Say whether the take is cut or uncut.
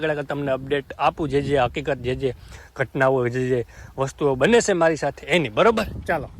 uncut